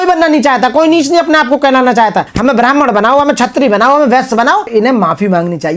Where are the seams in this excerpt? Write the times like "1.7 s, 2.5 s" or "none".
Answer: 2.3 s, 4.7 s